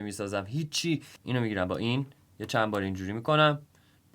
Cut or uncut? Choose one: cut